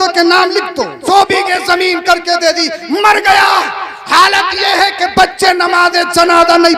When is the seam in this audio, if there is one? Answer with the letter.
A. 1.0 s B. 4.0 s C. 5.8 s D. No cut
A